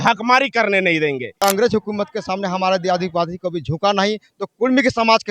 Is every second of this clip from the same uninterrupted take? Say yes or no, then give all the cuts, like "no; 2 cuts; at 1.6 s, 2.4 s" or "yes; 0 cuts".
no; 1 cut; at 1.4 s